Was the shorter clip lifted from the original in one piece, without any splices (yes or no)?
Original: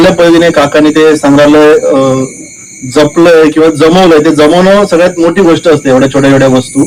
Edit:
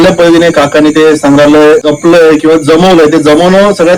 no